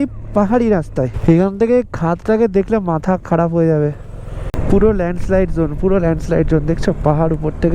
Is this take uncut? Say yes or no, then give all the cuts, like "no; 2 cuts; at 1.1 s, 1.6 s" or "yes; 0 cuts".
no; 2 cuts; at 1.1 s, 4.5 s